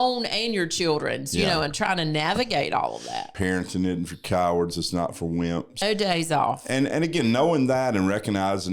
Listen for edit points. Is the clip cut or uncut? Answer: cut